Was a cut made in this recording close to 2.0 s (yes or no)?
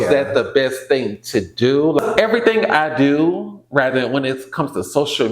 yes